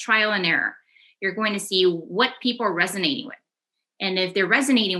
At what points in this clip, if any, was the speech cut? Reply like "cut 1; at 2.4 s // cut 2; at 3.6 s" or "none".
none